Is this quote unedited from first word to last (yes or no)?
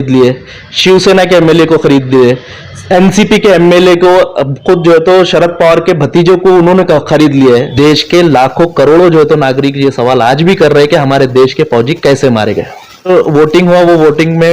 no